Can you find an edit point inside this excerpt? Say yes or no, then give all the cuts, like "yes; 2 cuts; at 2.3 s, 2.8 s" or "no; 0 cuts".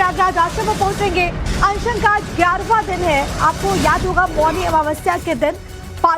yes; 1 cut; at 3.3 s